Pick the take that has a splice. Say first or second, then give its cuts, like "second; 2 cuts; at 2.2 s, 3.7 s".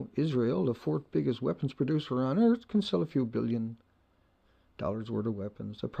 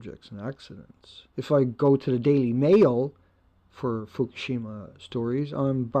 second; 1 cut; at 3.2 s